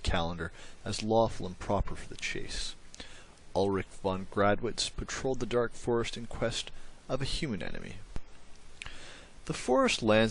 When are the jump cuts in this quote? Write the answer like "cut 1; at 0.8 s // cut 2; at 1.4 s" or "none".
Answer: cut 1; at 2.0 s